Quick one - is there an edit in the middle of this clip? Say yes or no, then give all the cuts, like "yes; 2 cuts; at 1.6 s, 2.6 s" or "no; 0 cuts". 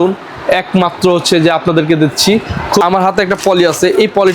yes; 1 cut; at 2.8 s